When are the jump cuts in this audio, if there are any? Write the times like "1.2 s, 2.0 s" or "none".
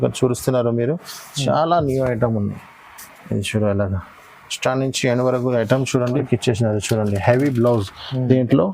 6.2 s